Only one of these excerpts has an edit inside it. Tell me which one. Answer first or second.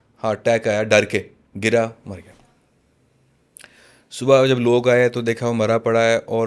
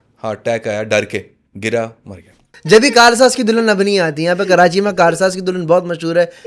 second